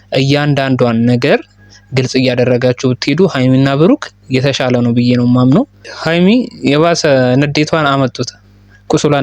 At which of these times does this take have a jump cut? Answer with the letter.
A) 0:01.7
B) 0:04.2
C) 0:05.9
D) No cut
C